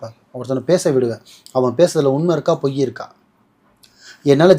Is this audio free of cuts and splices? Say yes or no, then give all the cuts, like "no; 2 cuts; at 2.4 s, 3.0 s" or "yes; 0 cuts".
yes; 0 cuts